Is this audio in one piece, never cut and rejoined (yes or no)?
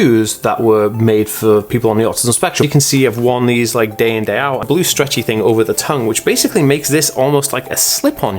no